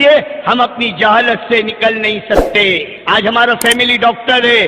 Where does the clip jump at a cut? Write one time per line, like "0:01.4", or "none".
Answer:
0:02.9